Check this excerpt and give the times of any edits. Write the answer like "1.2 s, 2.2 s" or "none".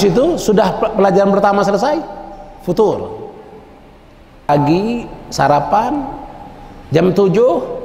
4.5 s